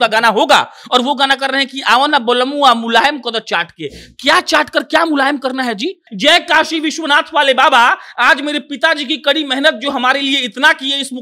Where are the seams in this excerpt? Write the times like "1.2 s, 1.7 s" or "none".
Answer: 6.1 s